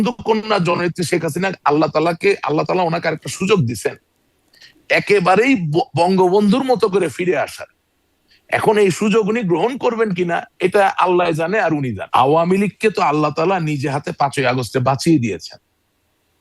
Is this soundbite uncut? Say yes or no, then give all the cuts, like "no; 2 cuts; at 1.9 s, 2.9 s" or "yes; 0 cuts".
no; 1 cut; at 12.0 s